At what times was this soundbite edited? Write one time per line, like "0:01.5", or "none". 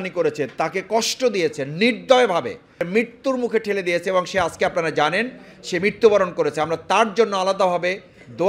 0:02.9